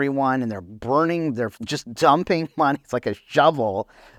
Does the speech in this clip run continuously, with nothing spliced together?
yes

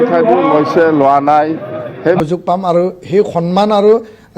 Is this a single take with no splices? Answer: no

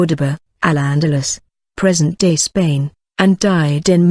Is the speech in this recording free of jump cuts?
yes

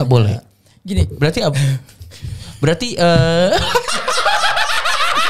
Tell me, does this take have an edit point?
no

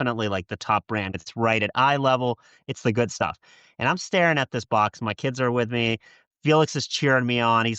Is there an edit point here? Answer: yes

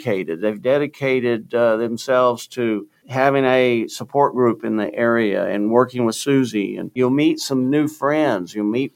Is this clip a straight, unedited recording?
no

